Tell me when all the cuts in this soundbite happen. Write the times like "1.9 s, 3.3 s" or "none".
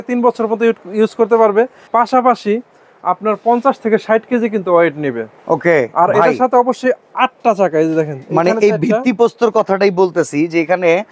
none

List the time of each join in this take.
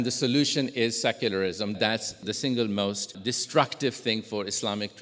1.7 s, 3.1 s

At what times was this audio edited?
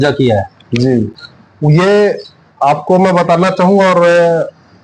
none

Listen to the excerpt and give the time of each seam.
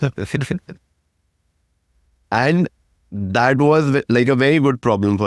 none

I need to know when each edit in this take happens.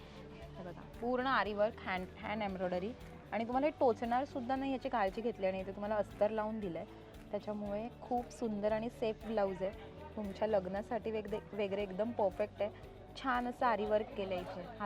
none

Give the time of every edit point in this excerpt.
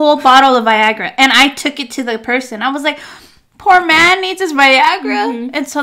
none

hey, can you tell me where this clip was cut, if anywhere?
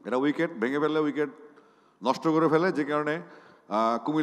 none

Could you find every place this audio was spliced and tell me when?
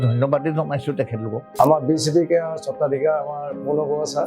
1.4 s

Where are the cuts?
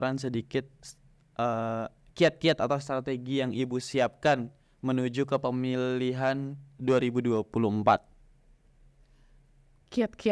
none

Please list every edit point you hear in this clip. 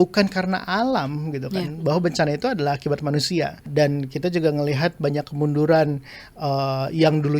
3.7 s

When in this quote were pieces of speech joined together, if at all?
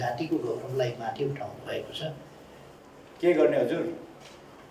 2.7 s

